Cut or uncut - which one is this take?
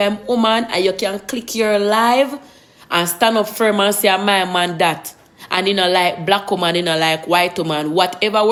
uncut